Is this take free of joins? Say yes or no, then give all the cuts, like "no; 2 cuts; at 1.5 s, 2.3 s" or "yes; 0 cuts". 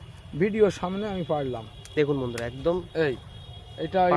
yes; 0 cuts